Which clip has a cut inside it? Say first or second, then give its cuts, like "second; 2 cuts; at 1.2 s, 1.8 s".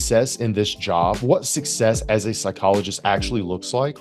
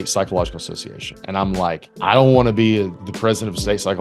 second; 2 cuts; at 1.9 s, 3.0 s